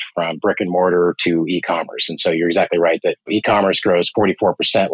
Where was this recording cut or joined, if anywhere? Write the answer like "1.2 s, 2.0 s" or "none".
3.3 s